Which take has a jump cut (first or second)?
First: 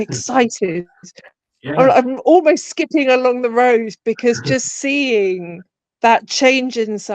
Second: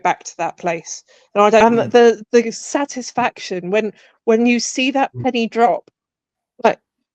second